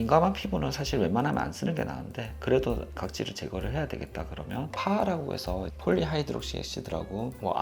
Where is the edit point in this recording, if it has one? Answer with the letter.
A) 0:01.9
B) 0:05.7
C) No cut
C